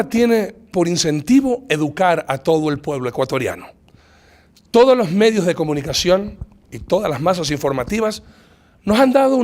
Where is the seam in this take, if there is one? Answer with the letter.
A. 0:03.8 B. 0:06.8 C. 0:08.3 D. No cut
D